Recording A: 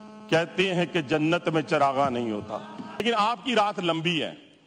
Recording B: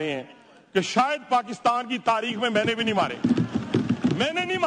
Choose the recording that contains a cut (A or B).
A